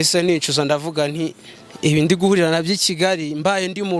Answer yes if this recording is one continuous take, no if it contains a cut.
yes